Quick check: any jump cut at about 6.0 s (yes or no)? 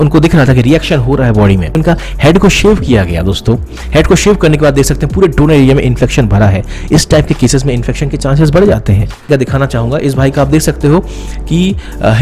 no